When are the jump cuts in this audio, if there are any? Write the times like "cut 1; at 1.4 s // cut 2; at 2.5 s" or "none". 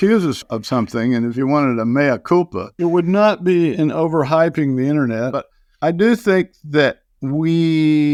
none

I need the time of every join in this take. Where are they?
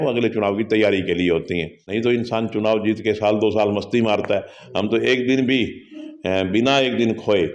none

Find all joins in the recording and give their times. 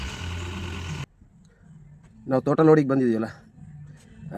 cut 1; at 1.1 s

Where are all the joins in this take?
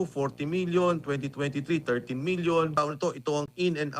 cut 1; at 2.7 s

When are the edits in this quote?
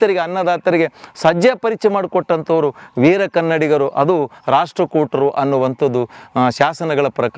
none

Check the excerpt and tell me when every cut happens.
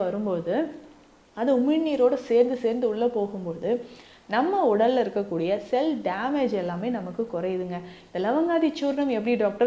none

